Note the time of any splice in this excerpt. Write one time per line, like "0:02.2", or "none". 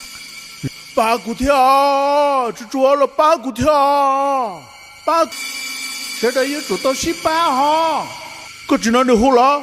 0:05.3